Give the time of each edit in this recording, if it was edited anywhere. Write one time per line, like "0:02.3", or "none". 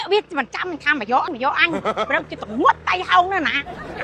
0:01.3